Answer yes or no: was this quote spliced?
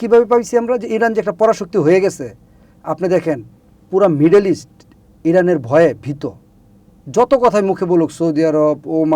no